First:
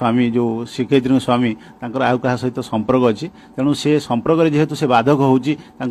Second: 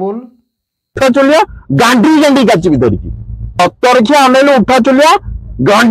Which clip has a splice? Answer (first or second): second